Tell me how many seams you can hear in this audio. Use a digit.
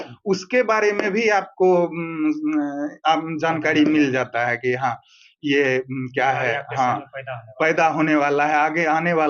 0